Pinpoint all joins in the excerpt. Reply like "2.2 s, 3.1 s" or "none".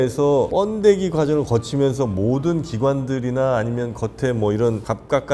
none